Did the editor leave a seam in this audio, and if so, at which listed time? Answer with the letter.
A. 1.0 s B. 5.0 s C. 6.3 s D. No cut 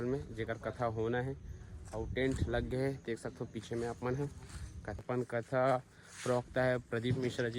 B